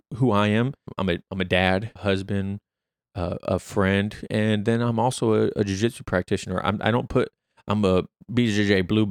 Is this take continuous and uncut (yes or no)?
no